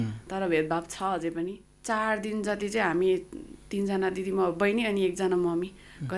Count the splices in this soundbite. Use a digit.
1